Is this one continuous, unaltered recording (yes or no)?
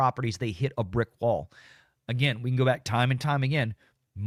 yes